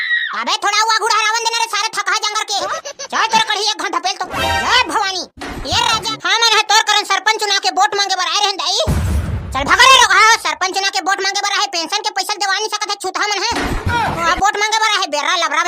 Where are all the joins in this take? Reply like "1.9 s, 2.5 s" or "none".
6.1 s